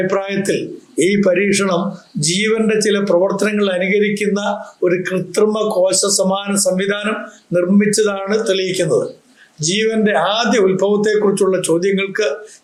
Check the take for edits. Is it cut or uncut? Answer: uncut